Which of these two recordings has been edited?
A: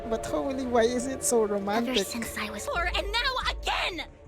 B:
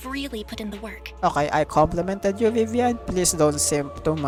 A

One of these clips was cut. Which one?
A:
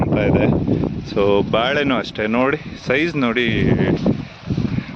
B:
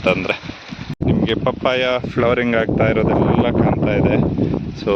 B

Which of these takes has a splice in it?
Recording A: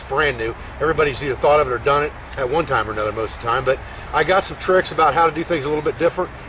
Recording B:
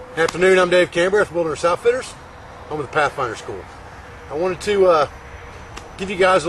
A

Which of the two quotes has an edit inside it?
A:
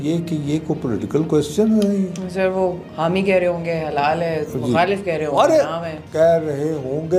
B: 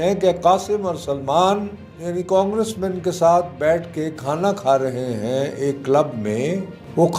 B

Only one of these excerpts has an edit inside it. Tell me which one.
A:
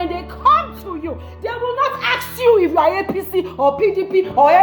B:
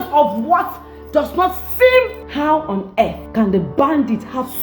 B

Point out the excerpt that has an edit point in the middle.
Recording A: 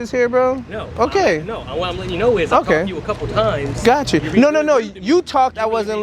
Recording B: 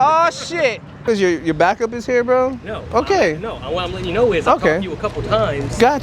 B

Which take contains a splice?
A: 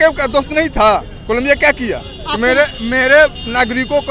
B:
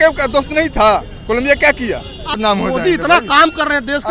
B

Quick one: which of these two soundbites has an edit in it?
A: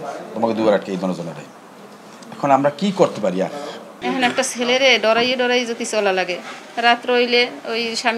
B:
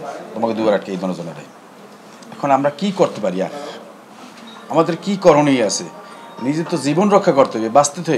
A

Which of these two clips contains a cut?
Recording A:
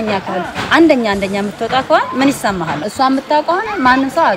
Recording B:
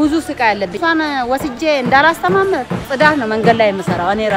B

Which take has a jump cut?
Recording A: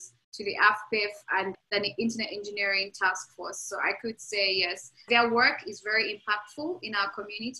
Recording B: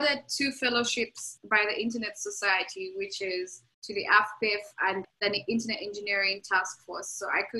A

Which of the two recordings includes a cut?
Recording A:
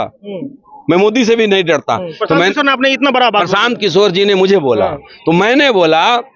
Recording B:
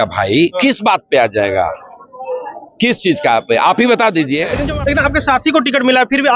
B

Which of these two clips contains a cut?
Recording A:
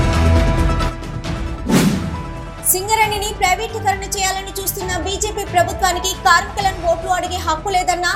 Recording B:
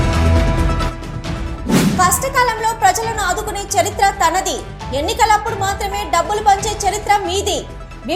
B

